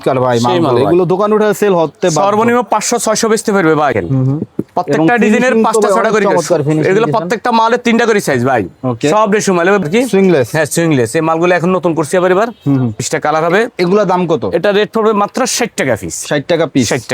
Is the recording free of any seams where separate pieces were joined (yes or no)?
no